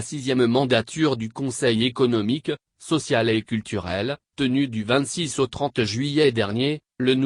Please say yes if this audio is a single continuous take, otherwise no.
no